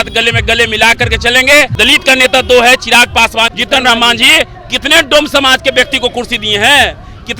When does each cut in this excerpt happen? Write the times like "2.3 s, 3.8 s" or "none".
1.7 s, 3.5 s